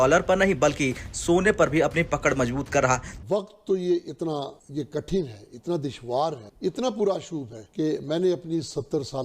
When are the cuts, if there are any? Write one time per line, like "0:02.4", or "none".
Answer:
0:03.1